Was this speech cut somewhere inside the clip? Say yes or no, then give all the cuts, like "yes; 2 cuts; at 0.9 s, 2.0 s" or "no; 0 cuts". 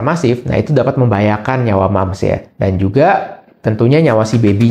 no; 0 cuts